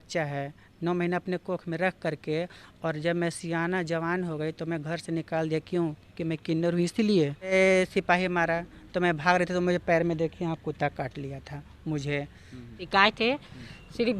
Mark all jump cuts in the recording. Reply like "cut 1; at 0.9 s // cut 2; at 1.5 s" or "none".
cut 1; at 7.5 s // cut 2; at 12.7 s

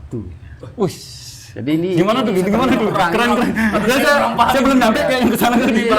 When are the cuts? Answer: none

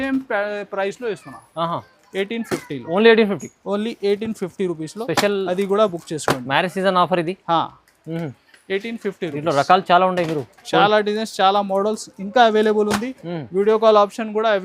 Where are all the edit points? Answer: none

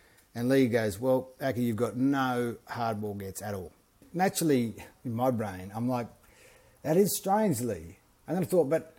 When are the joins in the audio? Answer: cut 1; at 4.1 s

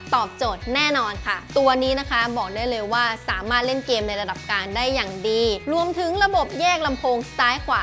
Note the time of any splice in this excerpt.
cut 1; at 1.4 s

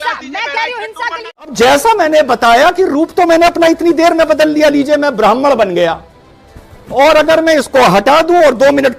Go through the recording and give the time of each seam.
cut 1; at 1.5 s

